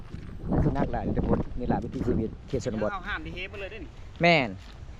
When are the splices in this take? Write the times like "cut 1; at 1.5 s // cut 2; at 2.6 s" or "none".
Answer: none